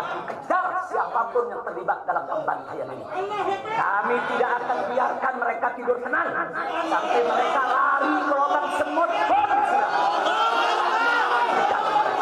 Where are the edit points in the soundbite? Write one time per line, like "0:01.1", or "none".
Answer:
none

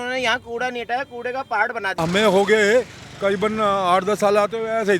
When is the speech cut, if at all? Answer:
0:01.9

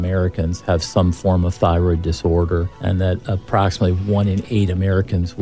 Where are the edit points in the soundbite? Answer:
none

